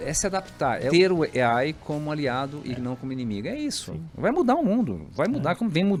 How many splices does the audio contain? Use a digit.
0